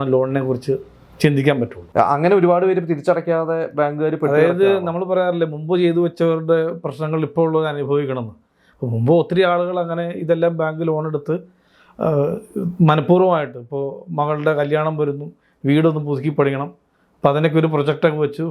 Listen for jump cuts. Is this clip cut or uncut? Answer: cut